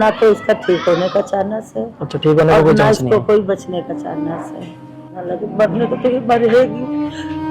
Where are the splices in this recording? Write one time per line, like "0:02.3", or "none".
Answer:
0:05.1